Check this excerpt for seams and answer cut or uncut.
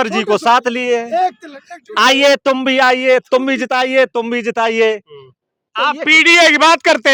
uncut